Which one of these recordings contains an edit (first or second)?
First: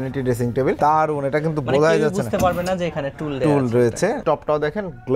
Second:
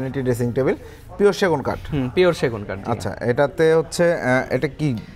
first